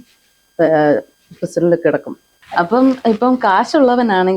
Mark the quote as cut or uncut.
cut